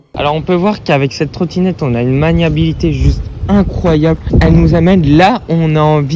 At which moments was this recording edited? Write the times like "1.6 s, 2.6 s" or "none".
none